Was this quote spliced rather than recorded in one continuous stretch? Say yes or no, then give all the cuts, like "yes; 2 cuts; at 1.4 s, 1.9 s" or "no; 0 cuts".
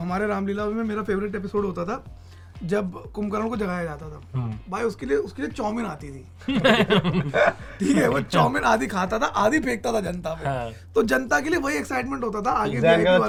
no; 0 cuts